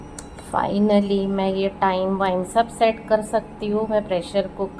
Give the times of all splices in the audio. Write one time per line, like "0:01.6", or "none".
none